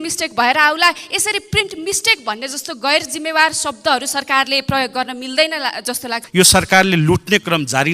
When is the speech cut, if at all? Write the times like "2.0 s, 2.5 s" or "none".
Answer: 6.2 s